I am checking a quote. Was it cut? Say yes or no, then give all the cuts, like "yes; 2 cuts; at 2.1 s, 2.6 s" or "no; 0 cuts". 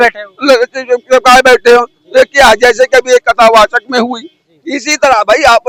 no; 0 cuts